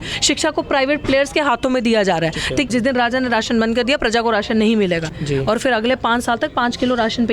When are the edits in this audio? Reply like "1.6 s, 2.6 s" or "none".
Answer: 2.7 s, 5.1 s

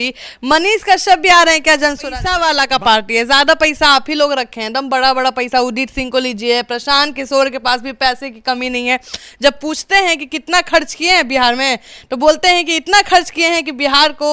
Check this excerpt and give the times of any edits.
2.2 s

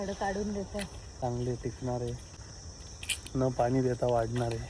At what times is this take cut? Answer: 1.0 s

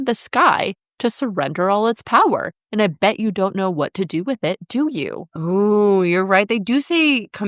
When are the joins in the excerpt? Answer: none

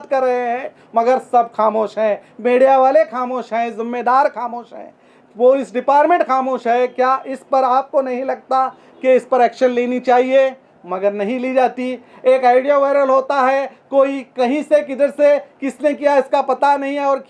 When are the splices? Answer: none

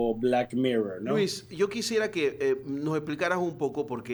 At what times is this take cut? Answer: none

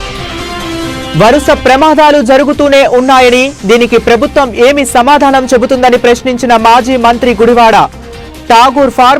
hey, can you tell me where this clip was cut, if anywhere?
1.0 s

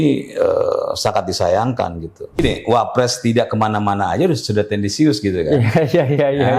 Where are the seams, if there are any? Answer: 2.4 s

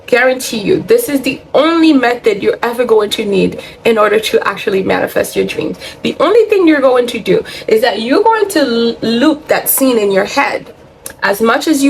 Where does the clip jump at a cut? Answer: none

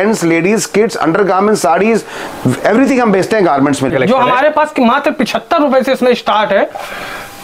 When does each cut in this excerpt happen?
3.9 s

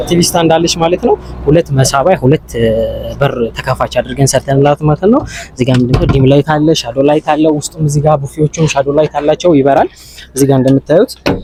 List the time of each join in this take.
none

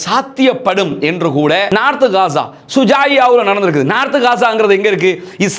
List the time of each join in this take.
1.7 s

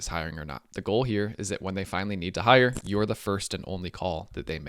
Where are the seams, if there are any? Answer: none

